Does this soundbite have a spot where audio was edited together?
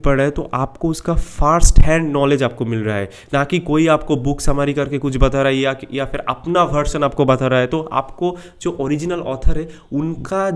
no; 0 cuts

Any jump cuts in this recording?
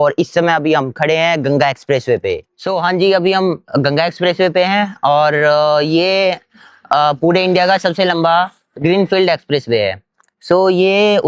yes; 1 cut; at 2.5 s

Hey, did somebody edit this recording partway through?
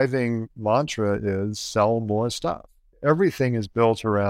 yes; 1 cut; at 3.0 s

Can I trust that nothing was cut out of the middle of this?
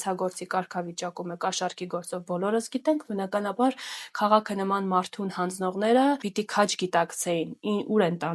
no; 1 cut; at 6.2 s

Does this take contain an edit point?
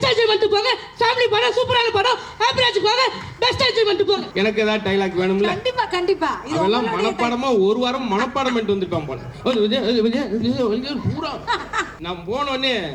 yes; 2 cuts; at 4.3 s, 12.0 s

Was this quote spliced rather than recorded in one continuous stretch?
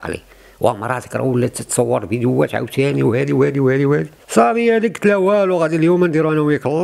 yes; 1 cut; at 4.2 s

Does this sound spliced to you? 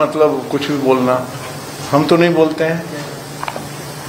no; 0 cuts

